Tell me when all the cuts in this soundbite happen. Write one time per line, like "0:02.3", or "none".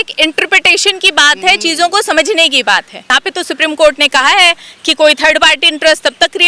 0:03.2

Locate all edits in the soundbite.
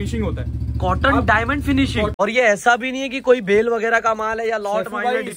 0:02.1

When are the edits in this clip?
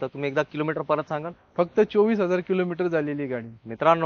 none

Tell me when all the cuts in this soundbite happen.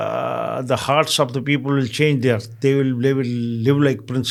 none

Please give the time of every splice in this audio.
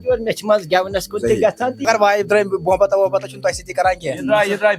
0:01.8

